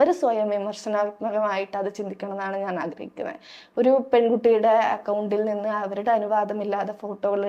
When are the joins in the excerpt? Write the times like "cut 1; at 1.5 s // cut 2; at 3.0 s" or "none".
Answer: none